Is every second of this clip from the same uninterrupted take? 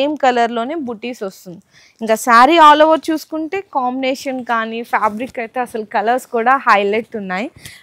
yes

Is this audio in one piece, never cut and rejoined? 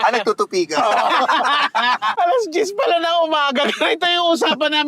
no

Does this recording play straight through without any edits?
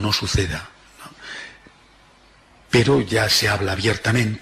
yes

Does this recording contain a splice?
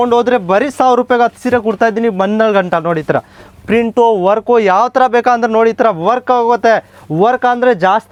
no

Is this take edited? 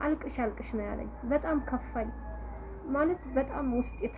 no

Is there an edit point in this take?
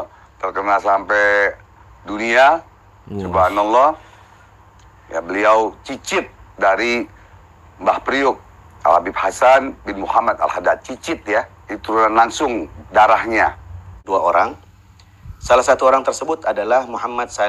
yes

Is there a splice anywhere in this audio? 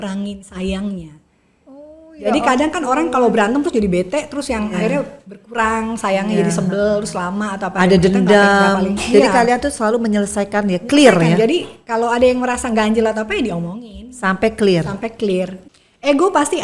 yes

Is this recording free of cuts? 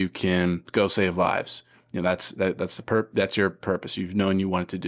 yes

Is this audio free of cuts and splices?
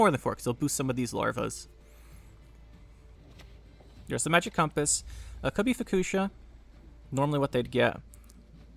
no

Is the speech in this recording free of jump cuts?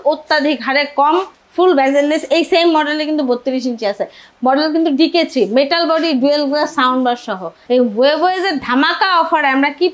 no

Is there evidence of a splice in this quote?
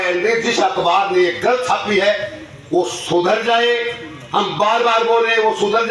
no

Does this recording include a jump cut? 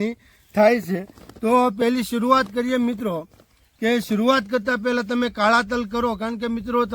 no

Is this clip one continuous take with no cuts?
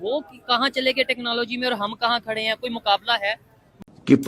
yes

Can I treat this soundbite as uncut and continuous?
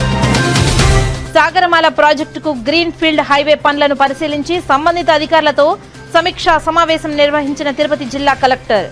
yes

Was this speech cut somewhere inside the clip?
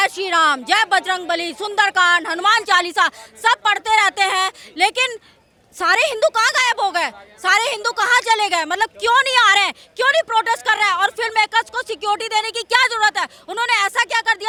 no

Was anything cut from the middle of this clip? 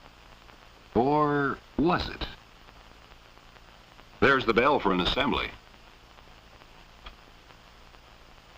no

